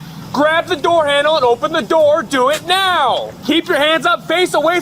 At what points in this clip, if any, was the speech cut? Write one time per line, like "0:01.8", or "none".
0:03.3